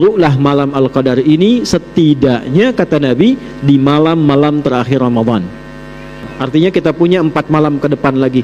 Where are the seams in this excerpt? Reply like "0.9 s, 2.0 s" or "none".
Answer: 6.3 s